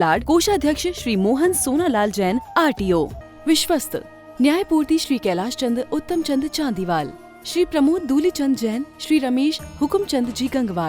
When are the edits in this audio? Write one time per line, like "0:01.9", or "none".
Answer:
0:03.2